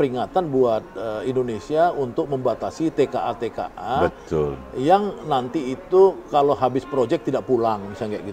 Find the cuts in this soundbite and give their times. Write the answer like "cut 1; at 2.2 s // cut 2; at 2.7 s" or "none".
none